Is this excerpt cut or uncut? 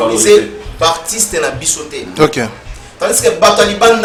uncut